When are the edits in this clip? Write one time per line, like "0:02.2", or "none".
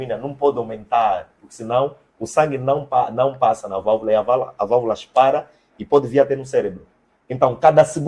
none